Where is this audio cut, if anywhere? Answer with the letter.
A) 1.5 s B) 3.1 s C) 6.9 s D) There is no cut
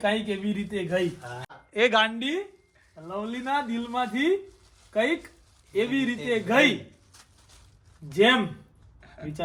A